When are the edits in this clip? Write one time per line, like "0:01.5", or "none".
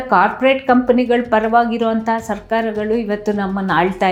none